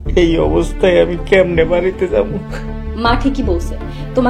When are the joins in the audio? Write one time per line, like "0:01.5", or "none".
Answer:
none